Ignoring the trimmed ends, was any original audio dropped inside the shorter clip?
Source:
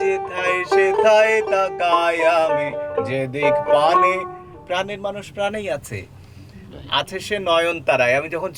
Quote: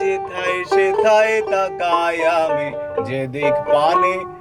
no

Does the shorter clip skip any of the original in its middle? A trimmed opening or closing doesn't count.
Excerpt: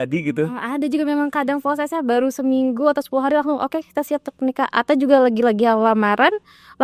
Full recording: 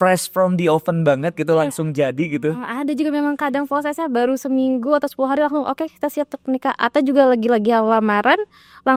no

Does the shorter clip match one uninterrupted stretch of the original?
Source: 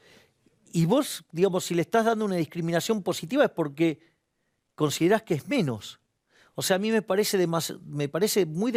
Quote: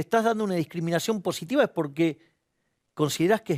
yes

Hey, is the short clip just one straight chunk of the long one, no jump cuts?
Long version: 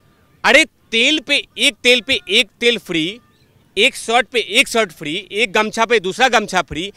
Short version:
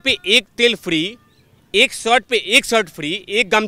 yes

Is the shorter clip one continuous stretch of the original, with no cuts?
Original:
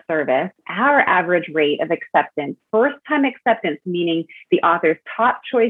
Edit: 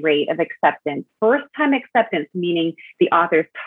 yes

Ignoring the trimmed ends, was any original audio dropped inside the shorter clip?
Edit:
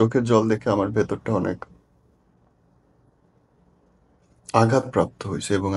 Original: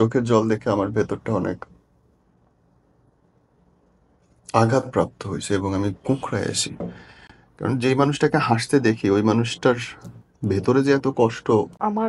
no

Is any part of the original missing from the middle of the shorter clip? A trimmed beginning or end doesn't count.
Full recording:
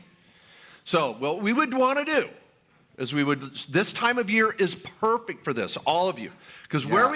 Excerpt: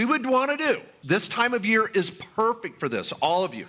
yes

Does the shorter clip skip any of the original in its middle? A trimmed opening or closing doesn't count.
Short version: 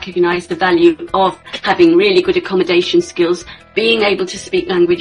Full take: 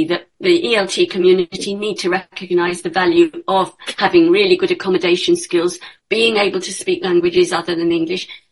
no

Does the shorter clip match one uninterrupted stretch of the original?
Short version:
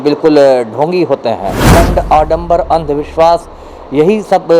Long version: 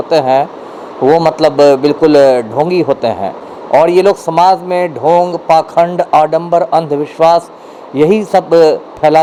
no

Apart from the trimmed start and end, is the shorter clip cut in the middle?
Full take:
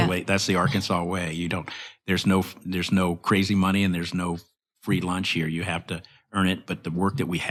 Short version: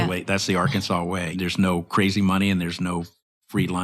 yes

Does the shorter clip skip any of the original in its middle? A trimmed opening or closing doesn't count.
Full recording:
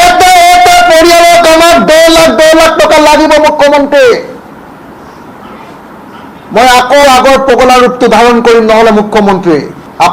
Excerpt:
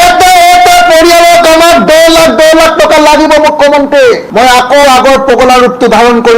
yes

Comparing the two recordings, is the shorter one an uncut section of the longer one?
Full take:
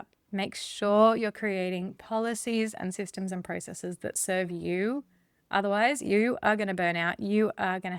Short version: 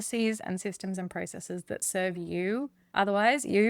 no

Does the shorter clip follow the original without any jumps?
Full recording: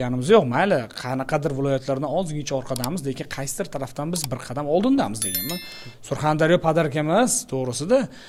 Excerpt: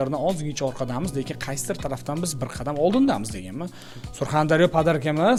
yes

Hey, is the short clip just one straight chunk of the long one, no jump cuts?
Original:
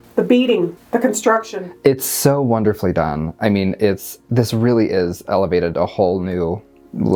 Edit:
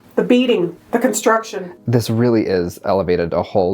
no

